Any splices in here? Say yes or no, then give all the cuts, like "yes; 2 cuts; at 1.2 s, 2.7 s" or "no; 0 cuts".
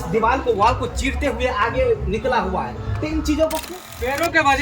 yes; 1 cut; at 3.7 s